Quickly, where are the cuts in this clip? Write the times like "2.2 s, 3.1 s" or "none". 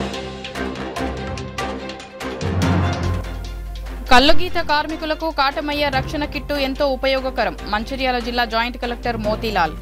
0.9 s